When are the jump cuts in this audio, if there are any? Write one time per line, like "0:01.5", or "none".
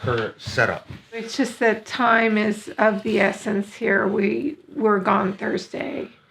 0:01.3